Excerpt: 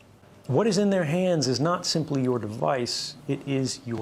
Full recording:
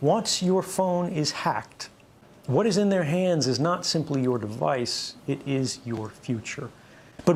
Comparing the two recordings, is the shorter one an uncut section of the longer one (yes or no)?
yes